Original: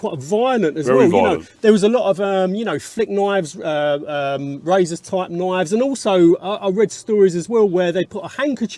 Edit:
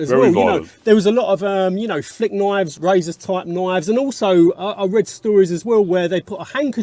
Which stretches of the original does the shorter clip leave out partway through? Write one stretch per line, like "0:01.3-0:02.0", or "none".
0:03.5-0:04.6